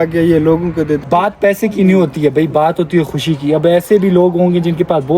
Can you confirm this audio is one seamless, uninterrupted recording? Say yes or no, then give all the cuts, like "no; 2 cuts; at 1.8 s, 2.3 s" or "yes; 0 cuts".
no; 1 cut; at 1.0 s